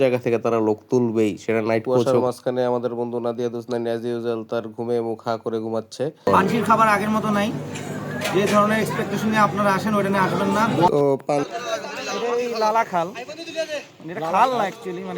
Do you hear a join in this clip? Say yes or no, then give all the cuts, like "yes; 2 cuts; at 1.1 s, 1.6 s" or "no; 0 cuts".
yes; 3 cuts; at 2.0 s, 6.3 s, 11.5 s